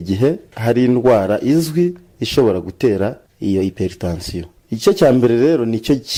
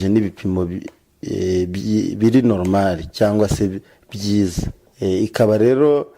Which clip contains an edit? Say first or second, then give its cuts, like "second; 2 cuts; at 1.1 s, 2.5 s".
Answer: second; 1 cut; at 2.6 s